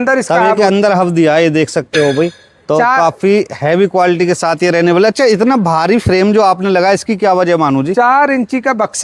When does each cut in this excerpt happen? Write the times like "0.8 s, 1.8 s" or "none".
none